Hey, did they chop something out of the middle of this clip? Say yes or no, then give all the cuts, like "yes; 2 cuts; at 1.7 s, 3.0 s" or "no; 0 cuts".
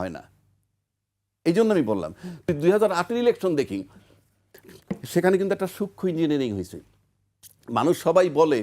yes; 1 cut; at 2.5 s